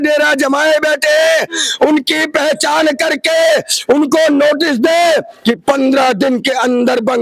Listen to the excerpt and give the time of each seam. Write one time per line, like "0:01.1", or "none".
none